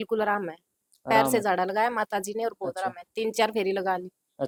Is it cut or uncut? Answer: uncut